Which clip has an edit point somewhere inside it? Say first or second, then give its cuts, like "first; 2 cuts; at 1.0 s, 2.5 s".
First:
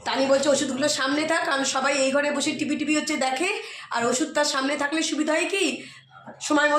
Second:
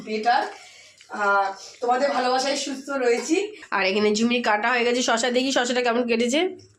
second; 1 cut; at 3.6 s